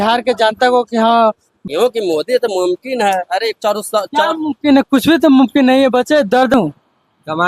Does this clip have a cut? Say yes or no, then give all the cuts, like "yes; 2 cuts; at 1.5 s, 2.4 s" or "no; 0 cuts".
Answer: yes; 2 cuts; at 1.5 s, 6.5 s